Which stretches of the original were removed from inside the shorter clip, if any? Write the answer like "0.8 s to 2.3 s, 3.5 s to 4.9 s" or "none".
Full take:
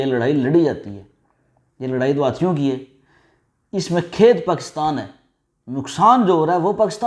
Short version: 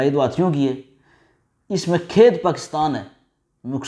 none